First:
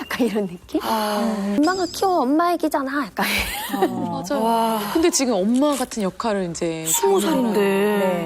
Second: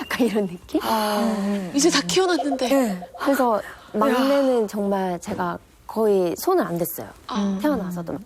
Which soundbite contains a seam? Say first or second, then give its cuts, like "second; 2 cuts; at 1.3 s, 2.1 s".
first; 1 cut; at 1.6 s